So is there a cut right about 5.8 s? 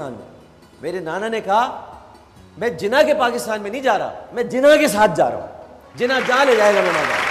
no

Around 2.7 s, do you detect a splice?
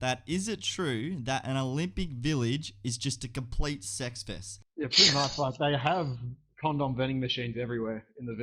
no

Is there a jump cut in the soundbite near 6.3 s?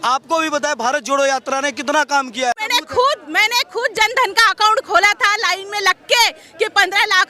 no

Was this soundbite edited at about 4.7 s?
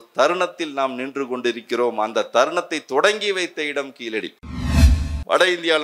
yes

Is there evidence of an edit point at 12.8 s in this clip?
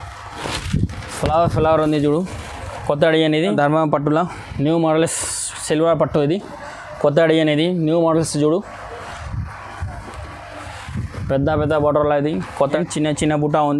yes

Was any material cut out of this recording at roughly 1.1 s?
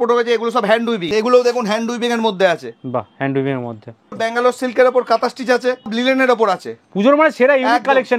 yes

